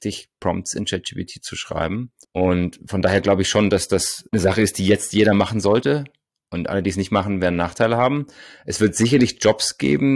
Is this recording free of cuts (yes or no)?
yes